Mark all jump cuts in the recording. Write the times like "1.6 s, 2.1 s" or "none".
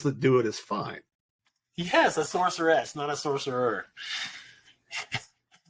none